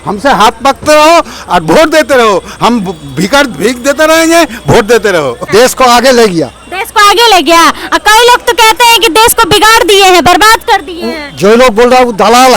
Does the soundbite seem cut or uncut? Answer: cut